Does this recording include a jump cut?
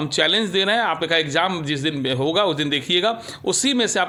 no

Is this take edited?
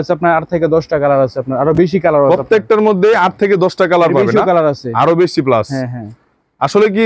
no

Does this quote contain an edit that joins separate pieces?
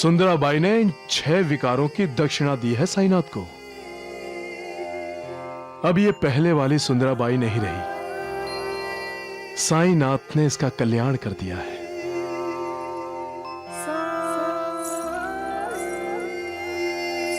no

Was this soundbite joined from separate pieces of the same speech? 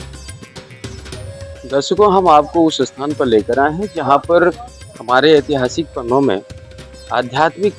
yes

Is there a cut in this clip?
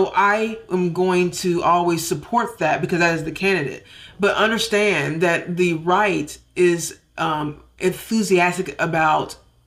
no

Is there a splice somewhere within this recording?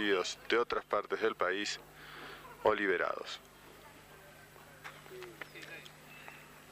no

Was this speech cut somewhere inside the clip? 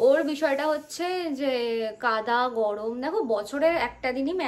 no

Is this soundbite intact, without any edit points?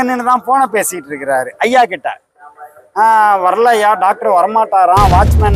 yes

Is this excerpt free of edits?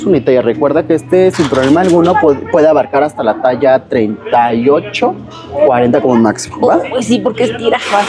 yes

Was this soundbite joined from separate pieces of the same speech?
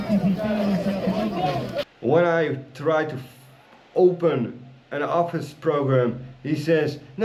yes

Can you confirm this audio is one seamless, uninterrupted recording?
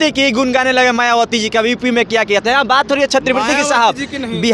yes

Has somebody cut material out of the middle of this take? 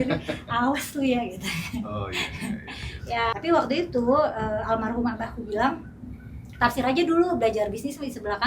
yes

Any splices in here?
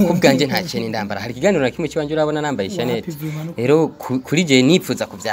no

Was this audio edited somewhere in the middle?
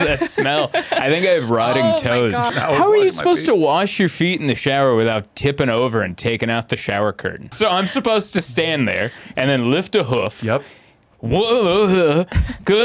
yes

